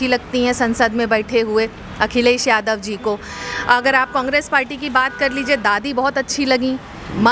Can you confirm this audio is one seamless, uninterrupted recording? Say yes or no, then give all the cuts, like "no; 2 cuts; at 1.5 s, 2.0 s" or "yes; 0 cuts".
yes; 0 cuts